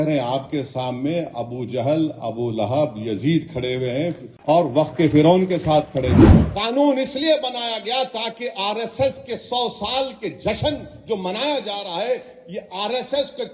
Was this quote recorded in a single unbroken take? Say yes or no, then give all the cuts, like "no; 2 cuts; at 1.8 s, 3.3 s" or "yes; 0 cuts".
no; 2 cuts; at 4.3 s, 6.4 s